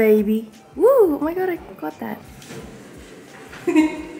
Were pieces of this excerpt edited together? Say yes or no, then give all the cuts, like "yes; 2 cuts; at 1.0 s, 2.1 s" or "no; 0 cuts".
no; 0 cuts